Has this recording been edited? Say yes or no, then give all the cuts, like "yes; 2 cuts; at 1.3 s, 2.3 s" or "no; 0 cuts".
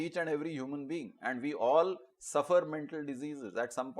no; 0 cuts